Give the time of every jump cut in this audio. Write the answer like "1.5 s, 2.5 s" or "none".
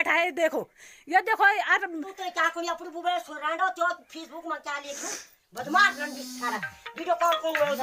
2.1 s